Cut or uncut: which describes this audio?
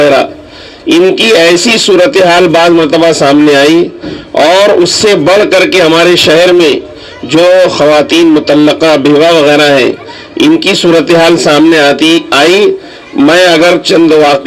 uncut